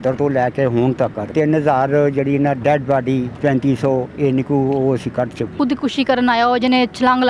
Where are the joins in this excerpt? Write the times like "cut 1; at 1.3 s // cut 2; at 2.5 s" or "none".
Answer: cut 1; at 1.3 s // cut 2; at 3.3 s // cut 3; at 5.5 s